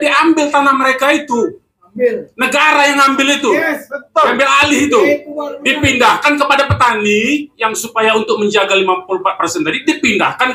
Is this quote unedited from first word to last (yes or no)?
yes